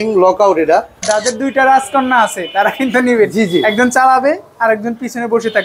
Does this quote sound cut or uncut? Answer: cut